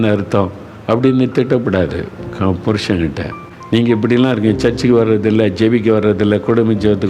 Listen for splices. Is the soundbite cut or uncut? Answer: uncut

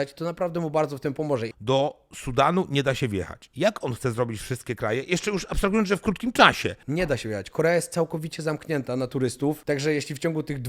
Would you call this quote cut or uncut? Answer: cut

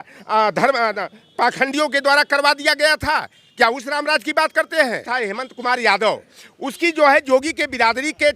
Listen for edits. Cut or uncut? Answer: cut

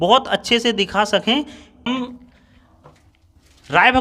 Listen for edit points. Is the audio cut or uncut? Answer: cut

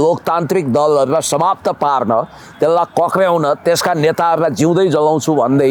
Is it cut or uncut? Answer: uncut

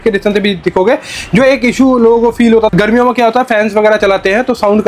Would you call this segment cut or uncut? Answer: cut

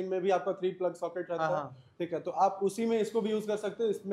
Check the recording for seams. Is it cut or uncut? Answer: uncut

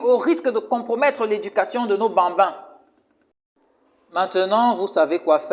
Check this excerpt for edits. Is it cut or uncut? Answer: cut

